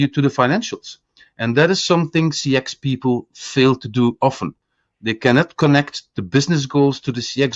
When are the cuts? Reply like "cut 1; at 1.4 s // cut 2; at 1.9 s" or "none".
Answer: none